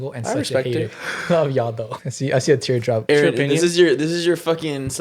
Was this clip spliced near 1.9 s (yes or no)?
yes